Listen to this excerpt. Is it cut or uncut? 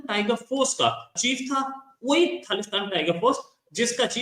cut